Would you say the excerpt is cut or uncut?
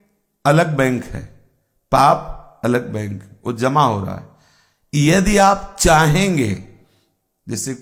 uncut